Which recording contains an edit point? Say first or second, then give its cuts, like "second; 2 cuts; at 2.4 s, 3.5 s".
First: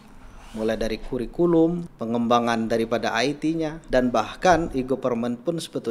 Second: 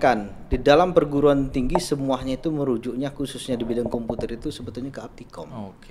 first; 2 cuts; at 1.9 s, 3.8 s